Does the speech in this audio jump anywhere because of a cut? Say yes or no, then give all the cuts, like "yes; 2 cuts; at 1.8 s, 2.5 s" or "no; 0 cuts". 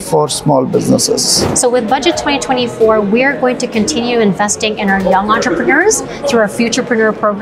yes; 1 cut; at 1.4 s